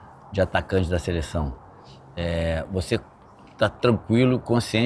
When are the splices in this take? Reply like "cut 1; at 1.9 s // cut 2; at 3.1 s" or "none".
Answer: none

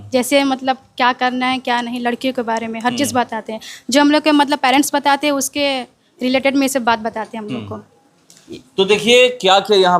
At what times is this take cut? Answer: none

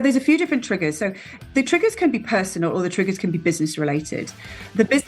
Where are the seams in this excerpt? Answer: cut 1; at 1.5 s

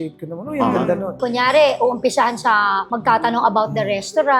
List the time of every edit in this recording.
cut 1; at 1.2 s

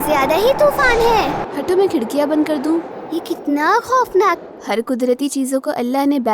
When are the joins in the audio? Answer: cut 1; at 1.4 s // cut 2; at 4.5 s

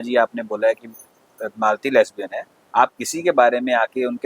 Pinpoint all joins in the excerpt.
cut 1; at 2.5 s

